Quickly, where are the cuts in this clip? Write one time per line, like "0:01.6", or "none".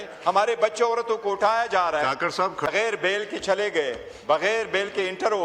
0:02.7